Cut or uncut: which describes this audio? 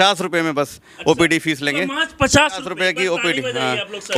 uncut